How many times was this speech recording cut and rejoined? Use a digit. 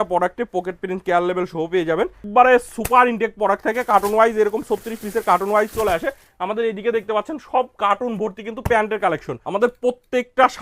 2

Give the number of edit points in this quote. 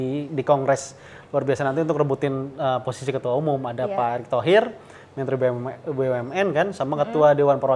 0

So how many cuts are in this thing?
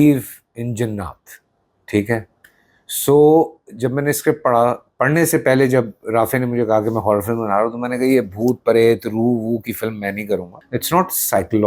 1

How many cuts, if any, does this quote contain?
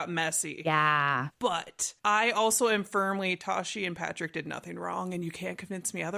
1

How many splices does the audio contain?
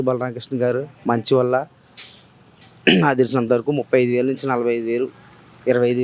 0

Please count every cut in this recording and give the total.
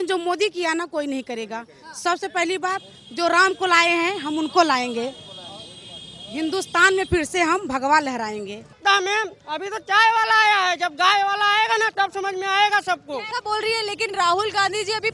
2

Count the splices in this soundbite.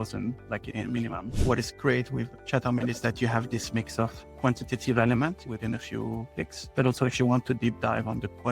1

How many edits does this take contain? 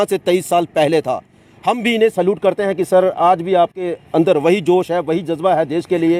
0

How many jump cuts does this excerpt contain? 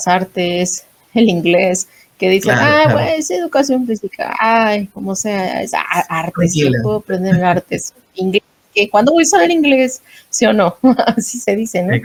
0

